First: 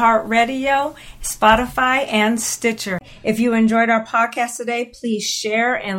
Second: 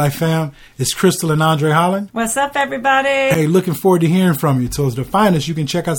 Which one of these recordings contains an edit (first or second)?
first